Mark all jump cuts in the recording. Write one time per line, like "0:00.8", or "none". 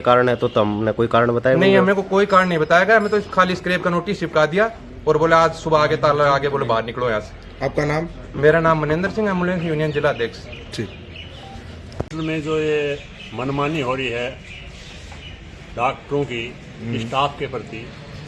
0:12.1